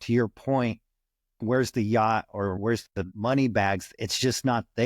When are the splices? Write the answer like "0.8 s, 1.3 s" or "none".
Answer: 1.4 s, 2.6 s